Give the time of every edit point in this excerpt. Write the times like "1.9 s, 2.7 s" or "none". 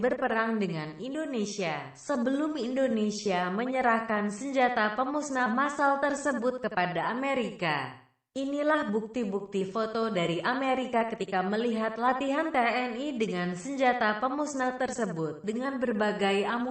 8.9 s